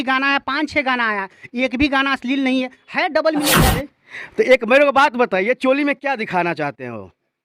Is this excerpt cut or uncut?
cut